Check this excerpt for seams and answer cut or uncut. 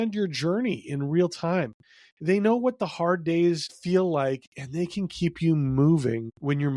cut